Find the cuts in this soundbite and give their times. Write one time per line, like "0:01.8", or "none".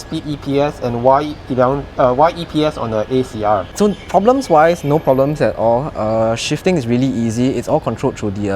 0:03.7